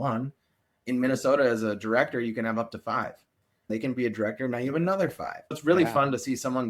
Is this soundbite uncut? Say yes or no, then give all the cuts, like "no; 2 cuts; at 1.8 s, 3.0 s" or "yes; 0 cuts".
no; 2 cuts; at 3.7 s, 5.6 s